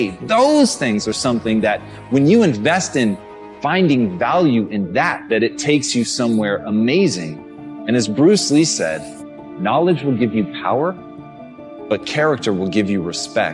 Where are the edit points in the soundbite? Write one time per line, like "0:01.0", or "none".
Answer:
none

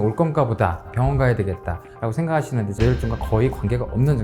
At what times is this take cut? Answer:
0:02.8

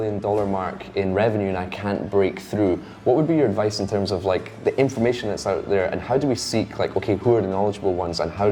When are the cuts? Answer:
none

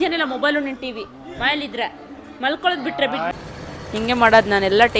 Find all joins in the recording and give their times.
0:03.3

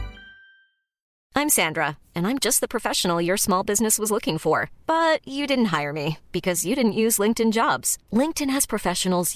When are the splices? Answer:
0:01.1

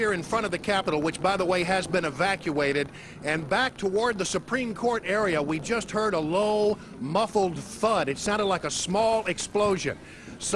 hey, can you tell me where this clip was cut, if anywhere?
0:09.1

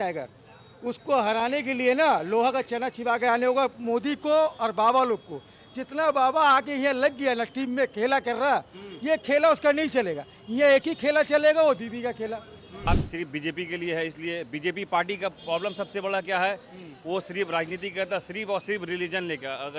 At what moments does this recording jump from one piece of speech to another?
0:12.9

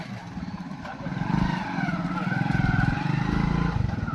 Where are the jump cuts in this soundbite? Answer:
none

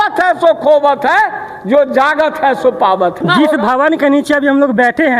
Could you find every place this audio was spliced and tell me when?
0:03.2

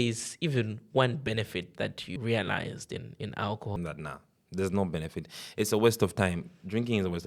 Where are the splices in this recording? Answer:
0:02.1
0:03.8

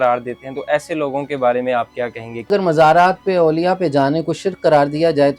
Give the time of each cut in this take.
0:02.5

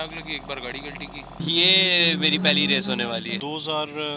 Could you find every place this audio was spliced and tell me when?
none

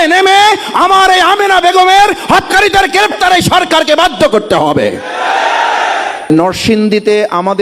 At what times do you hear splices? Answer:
0:06.3

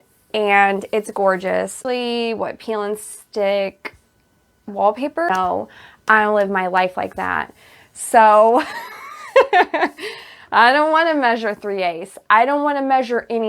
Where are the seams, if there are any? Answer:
0:01.8
0:05.3

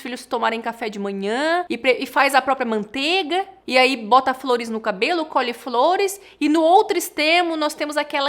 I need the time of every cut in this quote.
0:01.7
0:03.6

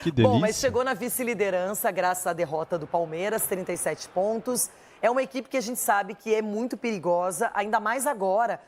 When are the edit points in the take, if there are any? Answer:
none

